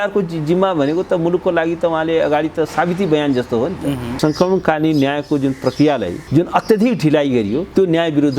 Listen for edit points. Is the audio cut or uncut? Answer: cut